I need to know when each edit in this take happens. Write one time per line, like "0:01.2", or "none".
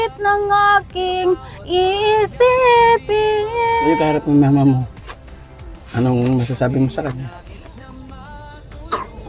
0:03.9

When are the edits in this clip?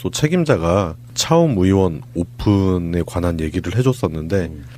none

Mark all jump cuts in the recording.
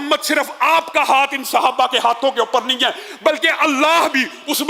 none

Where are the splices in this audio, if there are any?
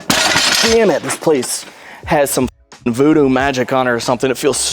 none

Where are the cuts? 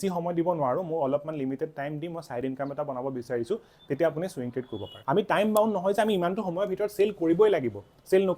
0:04.9

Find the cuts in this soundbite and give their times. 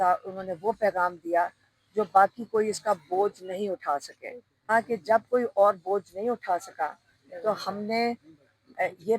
0:04.7

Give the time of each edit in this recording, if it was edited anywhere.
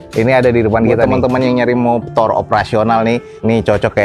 0:01.1

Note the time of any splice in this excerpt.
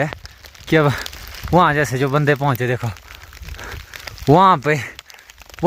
none

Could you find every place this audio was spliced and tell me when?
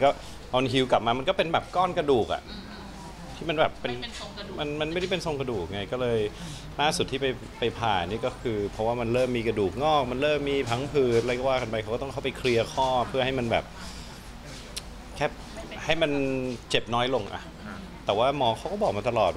none

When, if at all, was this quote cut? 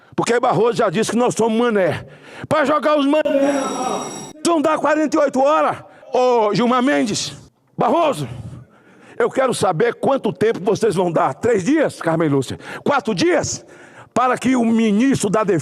0:06.1

